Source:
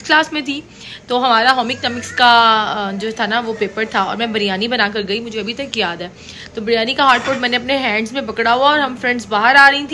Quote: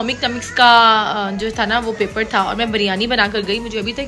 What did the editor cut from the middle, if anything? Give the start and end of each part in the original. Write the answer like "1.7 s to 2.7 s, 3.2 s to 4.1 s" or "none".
none